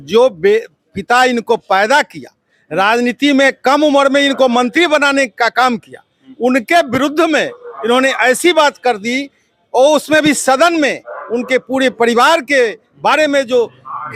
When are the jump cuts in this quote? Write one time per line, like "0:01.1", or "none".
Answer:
none